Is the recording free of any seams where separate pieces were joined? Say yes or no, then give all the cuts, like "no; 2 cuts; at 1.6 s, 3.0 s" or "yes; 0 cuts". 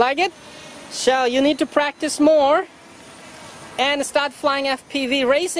yes; 0 cuts